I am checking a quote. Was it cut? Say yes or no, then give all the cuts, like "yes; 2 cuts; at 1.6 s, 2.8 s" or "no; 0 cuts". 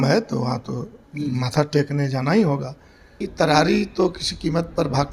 yes; 1 cut; at 3.2 s